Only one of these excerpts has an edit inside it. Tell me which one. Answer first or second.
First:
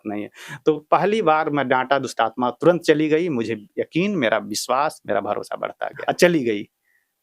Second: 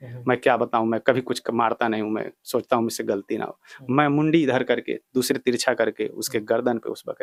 first